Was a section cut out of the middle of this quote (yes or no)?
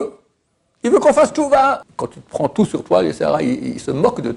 yes